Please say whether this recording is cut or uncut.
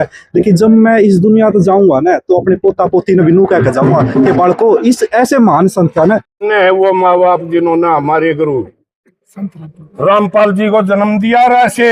cut